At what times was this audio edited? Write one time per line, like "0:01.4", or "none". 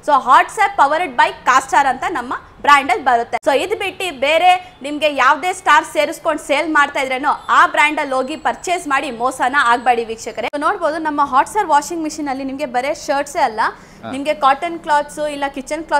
0:03.3
0:10.5